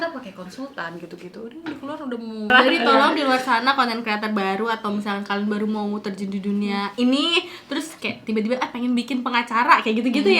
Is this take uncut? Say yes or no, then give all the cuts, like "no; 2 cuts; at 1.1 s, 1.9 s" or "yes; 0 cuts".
no; 1 cut; at 2.5 s